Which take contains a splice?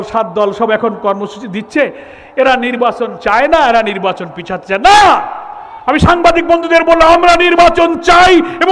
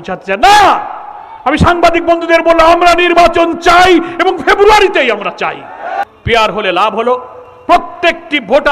second; 1 cut; at 6.0 s

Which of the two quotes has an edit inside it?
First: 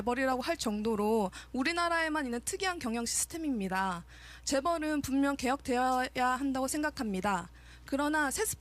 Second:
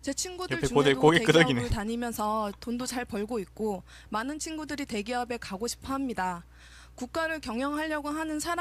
first; 1 cut; at 6.0 s

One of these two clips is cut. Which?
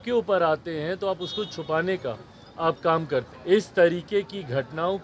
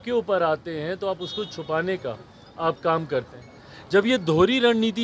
first; 1 cut; at 3.3 s

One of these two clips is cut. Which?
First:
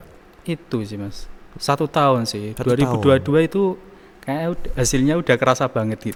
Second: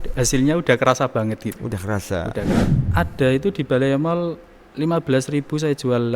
second; 1 cut; at 2.8 s

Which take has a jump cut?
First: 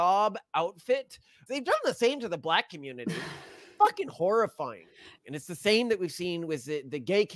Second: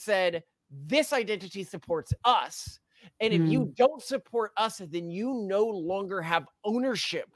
first; 2 cuts; at 1.3 s, 5.0 s

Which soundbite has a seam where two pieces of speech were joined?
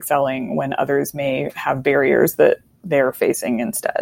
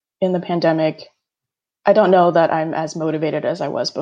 first; 1 cut; at 2.7 s

